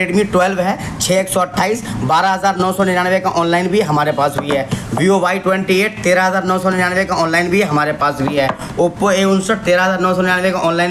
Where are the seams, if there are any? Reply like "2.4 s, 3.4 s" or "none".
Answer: none